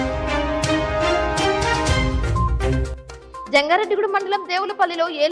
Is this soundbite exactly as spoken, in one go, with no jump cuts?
no; 1 cut; at 2.7 s

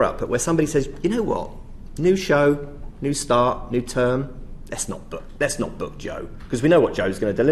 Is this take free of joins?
yes; 0 cuts

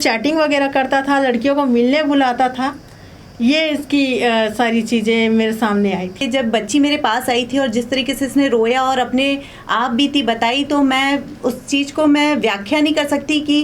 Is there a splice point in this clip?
yes; 1 cut; at 6.2 s

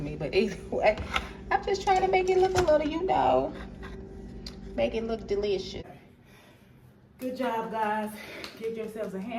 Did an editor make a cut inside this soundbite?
yes; 1 cut; at 5.8 s

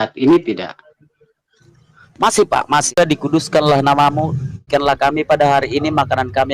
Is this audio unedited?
no; 2 cuts; at 2.9 s, 4.6 s

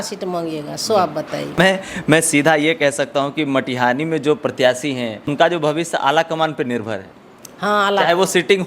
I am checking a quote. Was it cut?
yes; 2 cuts; at 1.6 s, 5.3 s

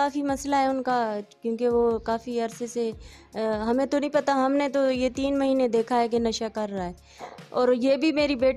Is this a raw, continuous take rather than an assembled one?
yes; 0 cuts

